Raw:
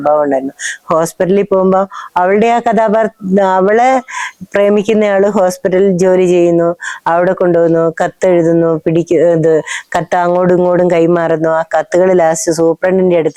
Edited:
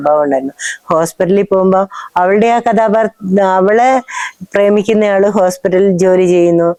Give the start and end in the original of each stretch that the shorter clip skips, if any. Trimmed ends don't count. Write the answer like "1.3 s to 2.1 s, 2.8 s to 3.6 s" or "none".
none